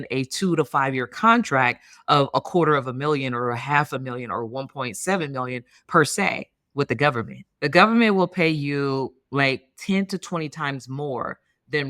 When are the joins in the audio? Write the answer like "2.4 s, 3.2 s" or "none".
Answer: 7.4 s